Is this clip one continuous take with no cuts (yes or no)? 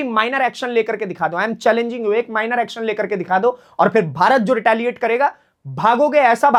yes